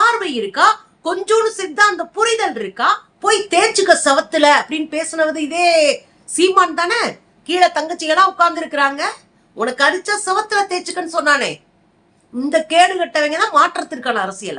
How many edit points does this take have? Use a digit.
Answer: 1